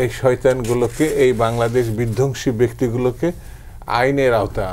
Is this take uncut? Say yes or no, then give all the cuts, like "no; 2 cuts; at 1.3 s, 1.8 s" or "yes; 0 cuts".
yes; 0 cuts